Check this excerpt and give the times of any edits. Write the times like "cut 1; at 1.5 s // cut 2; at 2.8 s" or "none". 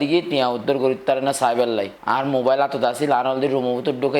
cut 1; at 1.9 s